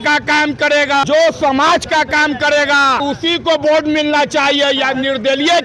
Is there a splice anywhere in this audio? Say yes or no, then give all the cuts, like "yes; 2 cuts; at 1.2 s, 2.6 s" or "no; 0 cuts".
yes; 2 cuts; at 1.0 s, 3.0 s